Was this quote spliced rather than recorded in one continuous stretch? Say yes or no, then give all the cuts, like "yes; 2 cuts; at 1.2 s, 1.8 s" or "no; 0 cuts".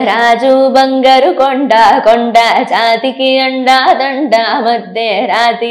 no; 0 cuts